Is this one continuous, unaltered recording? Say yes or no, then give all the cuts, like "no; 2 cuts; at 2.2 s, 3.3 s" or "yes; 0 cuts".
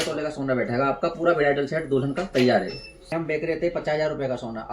no; 1 cut; at 3.1 s